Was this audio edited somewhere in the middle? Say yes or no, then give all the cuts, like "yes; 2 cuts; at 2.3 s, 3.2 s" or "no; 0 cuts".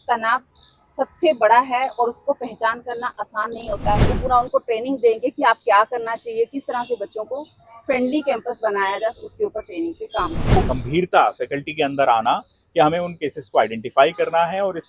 yes; 2 cuts; at 4.1 s, 10.6 s